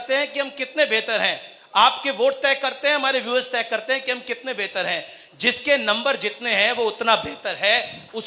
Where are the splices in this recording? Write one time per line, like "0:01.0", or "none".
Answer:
none